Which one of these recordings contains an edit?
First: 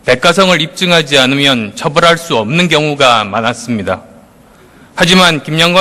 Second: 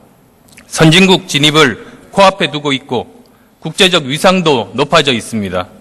first; 1 cut; at 4.5 s

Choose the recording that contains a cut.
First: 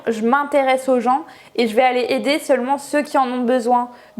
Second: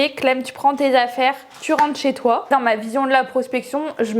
second; 1 cut; at 2.5 s

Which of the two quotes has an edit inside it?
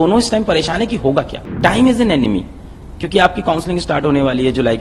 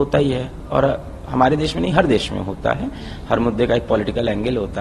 first; 1 cut; at 1.4 s

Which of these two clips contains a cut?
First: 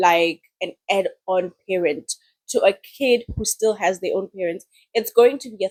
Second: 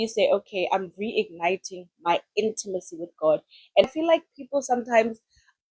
second; 1 cut; at 3.8 s

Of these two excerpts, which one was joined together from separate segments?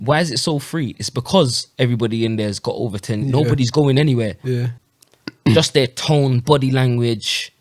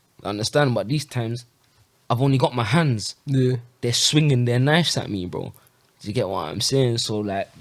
first; 1 cut; at 4.7 s

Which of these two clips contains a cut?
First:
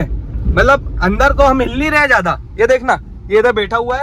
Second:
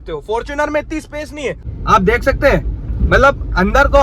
second; 1 cut; at 1.6 s

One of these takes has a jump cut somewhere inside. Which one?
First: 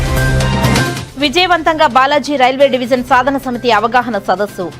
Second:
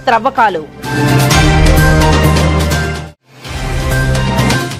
first; 1 cut; at 1.0 s

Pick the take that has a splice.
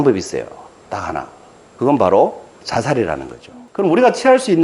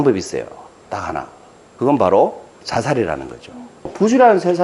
first; 1 cut; at 3.6 s

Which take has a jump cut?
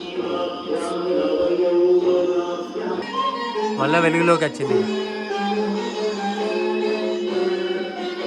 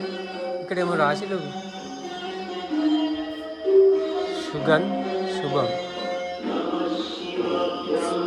first; 1 cut; at 3.0 s

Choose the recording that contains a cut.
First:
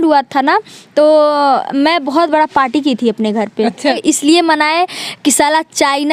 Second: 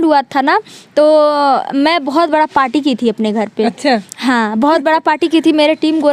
first; 1 cut; at 4.0 s

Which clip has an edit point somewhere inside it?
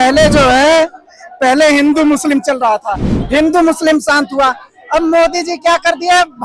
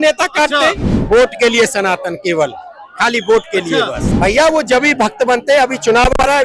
second; 2 cuts; at 0.9 s, 4.0 s

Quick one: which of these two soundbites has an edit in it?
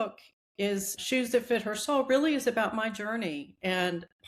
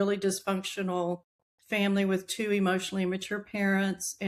first; 1 cut; at 1.0 s

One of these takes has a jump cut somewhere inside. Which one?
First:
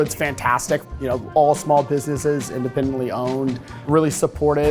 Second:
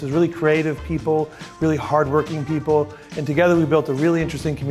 first; 2 cuts; at 0.9 s, 3.9 s

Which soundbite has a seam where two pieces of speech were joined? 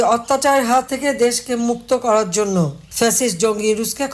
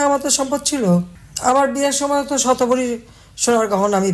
first; 2 cuts; at 0.9 s, 2.8 s

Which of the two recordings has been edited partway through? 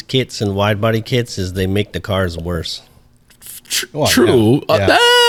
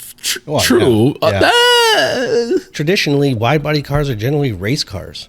second; 1 cut; at 2.8 s

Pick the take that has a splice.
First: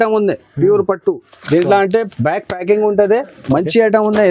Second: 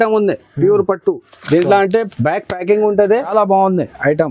second; 1 cut; at 3.3 s

